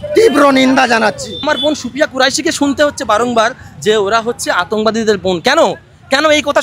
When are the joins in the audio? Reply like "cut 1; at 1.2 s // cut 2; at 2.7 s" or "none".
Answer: cut 1; at 1.4 s